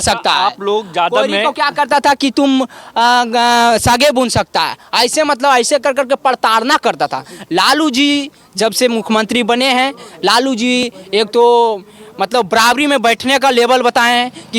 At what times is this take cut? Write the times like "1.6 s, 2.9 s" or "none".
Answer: none